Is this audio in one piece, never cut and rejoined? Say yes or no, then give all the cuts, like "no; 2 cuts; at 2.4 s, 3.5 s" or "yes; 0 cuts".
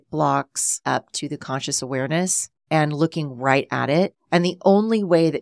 no; 3 cuts; at 0.8 s, 2.5 s, 4.2 s